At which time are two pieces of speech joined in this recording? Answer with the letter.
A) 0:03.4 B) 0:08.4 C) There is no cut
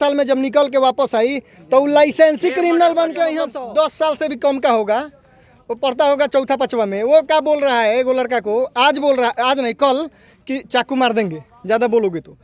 A